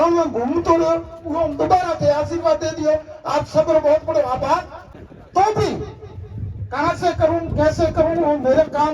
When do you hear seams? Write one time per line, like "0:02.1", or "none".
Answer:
0:04.8

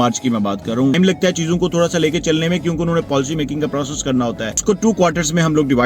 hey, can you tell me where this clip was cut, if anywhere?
0:00.9
0:04.6

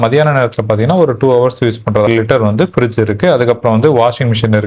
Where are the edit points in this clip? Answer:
0:02.1

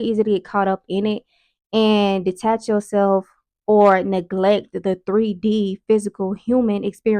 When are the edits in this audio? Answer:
none

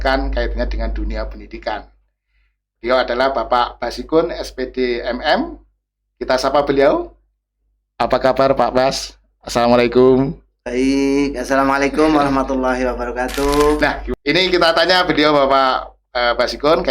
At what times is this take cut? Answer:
0:13.8

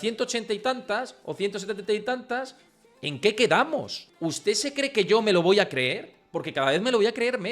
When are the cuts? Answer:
0:04.0

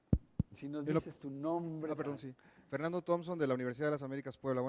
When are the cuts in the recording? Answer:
0:02.6

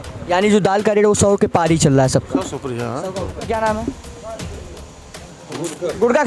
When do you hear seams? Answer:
0:03.4

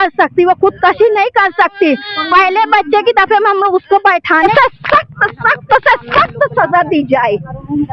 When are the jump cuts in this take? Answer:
0:04.5

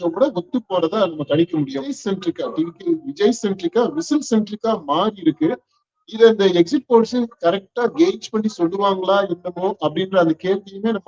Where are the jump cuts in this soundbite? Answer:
0:02.0

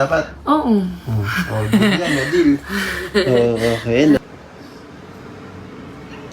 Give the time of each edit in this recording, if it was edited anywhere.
0:04.2

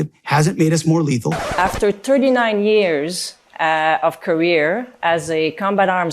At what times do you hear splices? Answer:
0:01.4

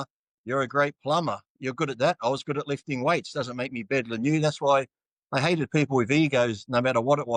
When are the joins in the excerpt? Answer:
none

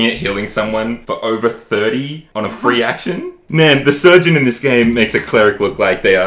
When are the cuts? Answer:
0:01.0
0:02.2
0:03.4

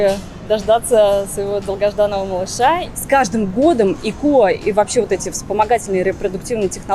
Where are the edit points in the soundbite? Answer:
0:02.9

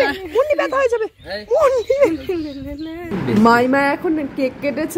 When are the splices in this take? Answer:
0:03.1

